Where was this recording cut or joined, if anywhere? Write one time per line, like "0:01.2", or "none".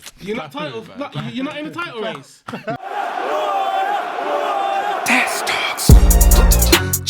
0:02.8